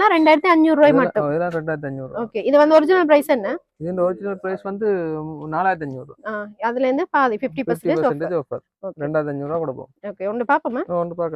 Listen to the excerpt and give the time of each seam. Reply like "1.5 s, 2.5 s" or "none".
none